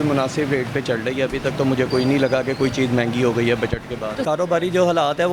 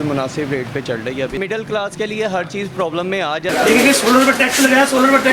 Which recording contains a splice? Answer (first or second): second